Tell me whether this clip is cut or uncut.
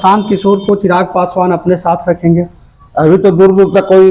uncut